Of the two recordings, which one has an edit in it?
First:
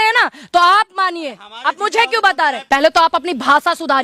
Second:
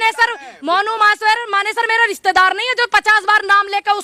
first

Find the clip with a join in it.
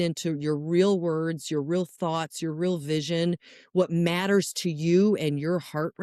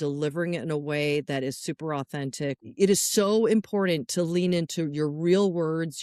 second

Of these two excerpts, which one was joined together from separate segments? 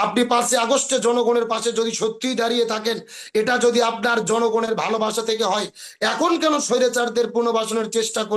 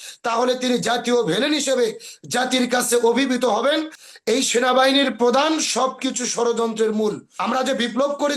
second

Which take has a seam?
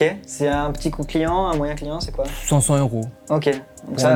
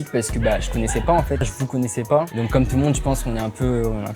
second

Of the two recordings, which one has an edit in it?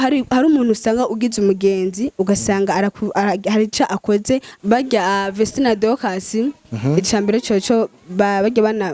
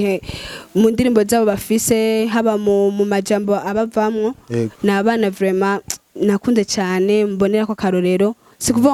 first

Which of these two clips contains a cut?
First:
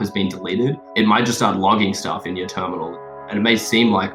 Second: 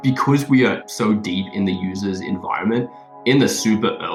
first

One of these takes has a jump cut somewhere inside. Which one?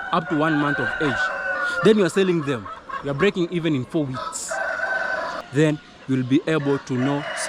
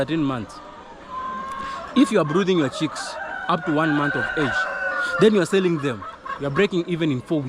first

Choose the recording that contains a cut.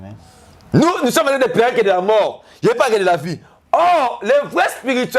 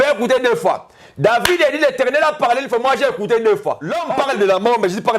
second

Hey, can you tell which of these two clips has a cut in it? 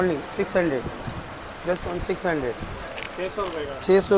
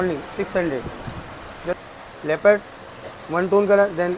second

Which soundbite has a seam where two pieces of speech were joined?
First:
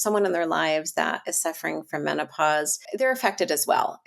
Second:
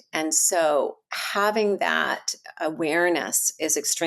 first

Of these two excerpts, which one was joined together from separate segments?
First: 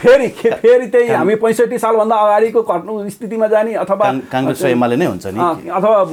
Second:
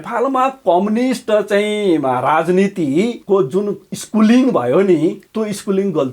second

